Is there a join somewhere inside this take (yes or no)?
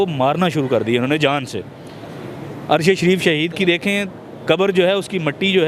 no